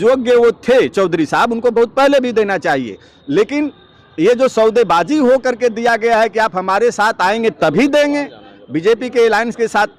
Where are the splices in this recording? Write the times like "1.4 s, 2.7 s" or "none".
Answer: none